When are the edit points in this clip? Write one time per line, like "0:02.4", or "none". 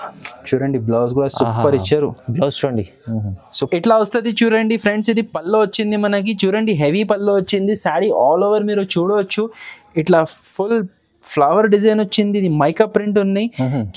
0:03.7

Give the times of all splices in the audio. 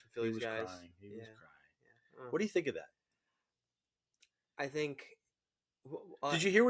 none

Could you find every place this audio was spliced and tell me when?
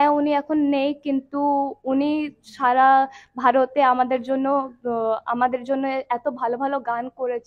none

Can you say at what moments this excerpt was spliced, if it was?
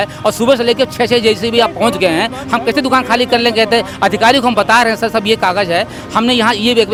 none

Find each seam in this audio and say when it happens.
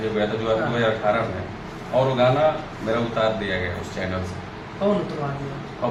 none

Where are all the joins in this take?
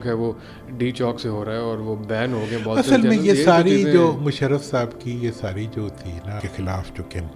0:06.4

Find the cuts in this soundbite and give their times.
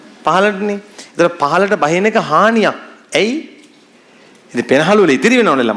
none

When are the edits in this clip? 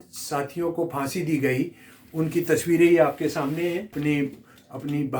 0:03.9

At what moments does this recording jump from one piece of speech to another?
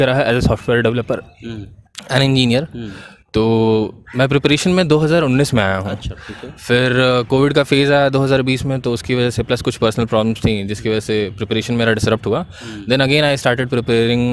none

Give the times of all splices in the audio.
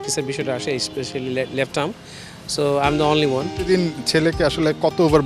0:03.5

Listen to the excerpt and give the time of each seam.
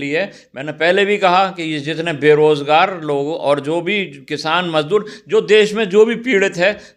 none

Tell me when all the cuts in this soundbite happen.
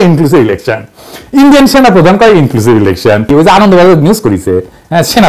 0:03.3

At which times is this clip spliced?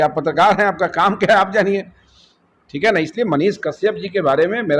none

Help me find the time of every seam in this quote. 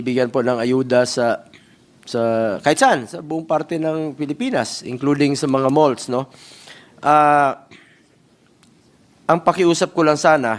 none

